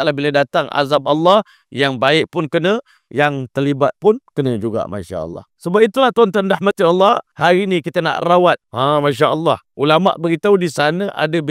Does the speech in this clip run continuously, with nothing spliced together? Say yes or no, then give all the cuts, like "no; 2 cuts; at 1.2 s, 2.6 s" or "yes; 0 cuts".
no; 4 cuts; at 5.5 s, 7.3 s, 8.7 s, 9.7 s